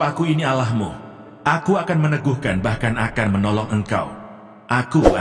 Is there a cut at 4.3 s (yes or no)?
no